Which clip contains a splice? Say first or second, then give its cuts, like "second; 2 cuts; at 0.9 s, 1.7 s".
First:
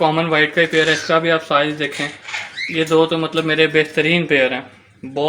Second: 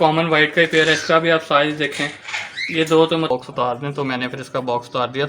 second; 1 cut; at 3.3 s